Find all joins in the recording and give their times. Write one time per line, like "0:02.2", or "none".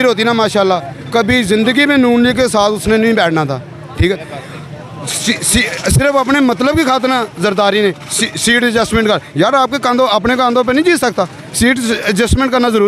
none